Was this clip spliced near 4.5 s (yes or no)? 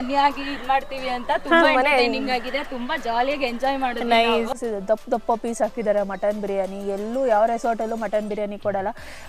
yes